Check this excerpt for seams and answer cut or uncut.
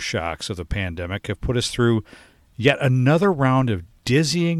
uncut